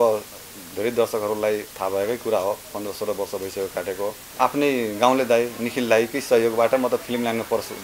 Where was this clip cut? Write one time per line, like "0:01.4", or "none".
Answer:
0:04.2

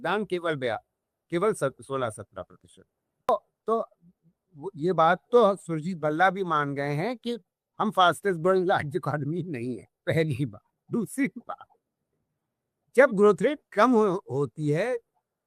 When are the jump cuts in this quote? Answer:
0:03.3

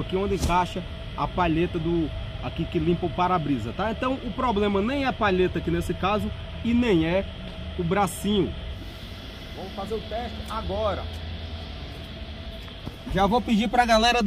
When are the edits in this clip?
0:08.6

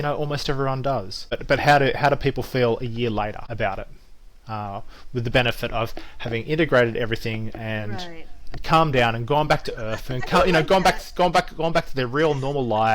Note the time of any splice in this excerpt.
0:01.3
0:03.4

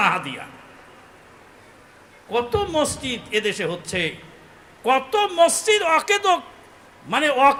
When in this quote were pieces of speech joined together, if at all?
none

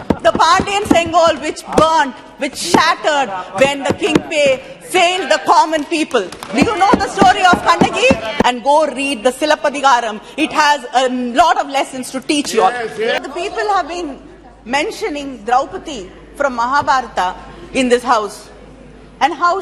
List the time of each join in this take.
0:08.4
0:13.2

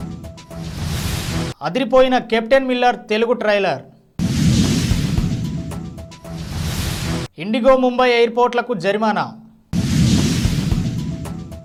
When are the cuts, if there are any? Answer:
none

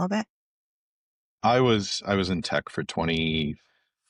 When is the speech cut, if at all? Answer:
none

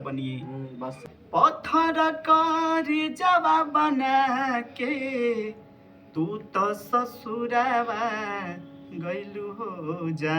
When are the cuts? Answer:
0:01.0

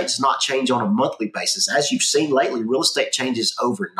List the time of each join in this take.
none

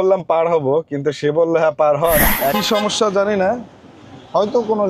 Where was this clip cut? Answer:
0:02.5

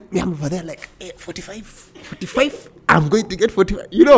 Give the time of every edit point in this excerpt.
none

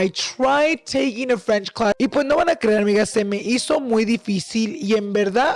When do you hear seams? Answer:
0:02.0

